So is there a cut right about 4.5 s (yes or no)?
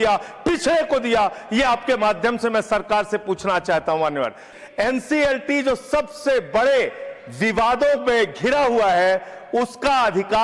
yes